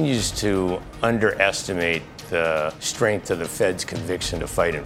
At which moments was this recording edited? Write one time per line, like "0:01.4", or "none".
0:02.8